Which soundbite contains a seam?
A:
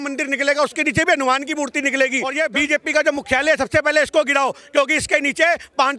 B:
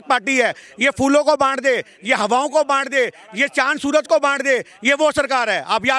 A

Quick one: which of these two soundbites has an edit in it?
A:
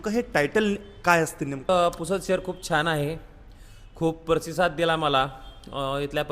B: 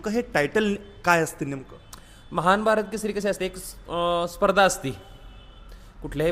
A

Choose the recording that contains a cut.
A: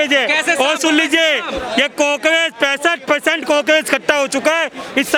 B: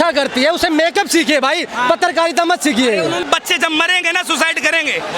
B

